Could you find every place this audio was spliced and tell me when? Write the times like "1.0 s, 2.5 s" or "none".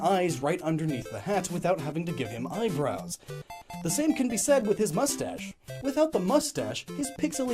4.5 s